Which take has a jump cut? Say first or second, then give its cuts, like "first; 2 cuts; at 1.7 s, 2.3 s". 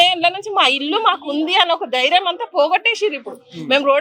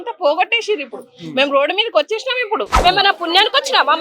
second; 1 cut; at 2.7 s